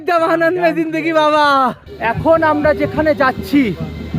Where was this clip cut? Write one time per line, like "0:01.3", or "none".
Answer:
0:01.9